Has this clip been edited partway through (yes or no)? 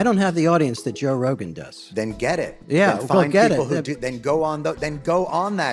no